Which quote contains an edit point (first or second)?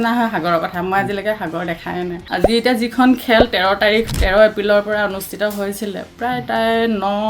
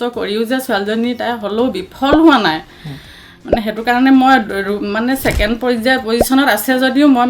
first